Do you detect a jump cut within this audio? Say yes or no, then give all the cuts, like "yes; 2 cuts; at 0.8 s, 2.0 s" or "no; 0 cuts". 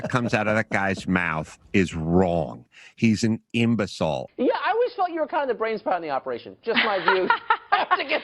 yes; 1 cut; at 4.3 s